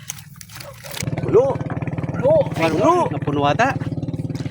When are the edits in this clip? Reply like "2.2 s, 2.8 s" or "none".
1.0 s